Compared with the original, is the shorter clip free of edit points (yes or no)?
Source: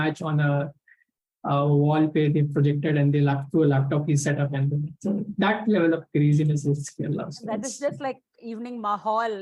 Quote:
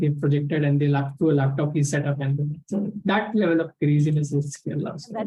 yes